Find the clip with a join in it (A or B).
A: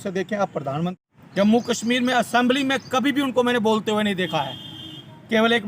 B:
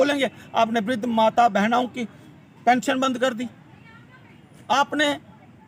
A